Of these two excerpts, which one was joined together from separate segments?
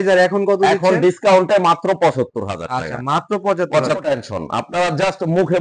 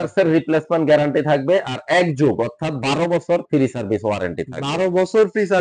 first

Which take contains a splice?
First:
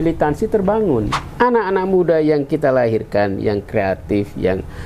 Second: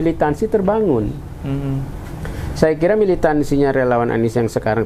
first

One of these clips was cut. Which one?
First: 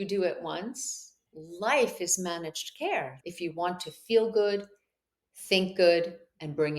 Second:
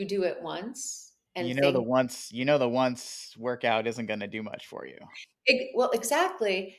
first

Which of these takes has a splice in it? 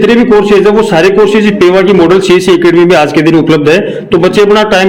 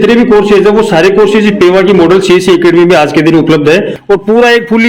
second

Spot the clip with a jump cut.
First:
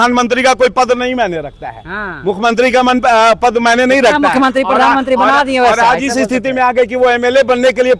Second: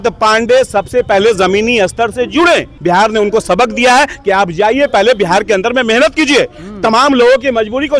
second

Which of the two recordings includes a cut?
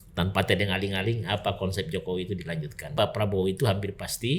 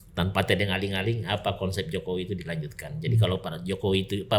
first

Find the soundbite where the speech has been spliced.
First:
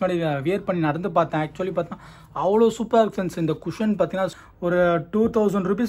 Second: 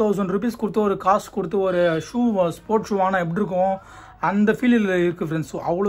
first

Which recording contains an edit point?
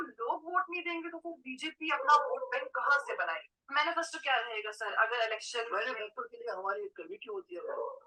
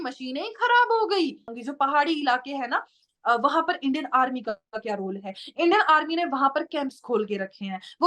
second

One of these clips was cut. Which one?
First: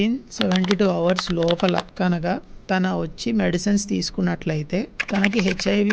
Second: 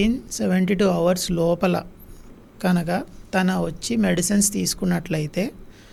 first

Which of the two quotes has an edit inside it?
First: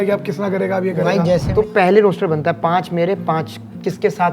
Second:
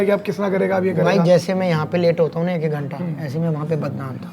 first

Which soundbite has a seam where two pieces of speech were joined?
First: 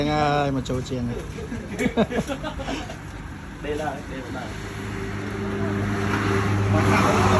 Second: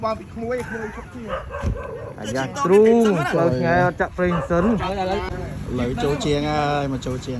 second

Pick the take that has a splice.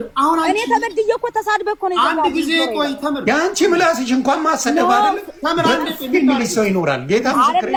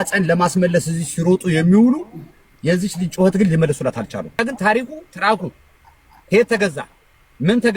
second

